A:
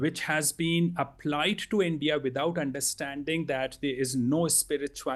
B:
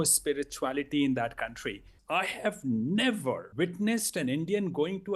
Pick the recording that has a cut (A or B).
B